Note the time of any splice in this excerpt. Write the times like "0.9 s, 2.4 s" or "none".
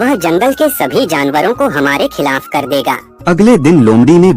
3.1 s